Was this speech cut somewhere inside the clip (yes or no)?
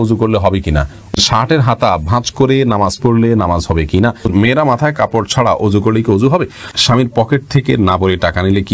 yes